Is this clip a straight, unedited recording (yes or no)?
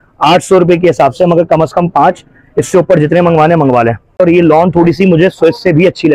no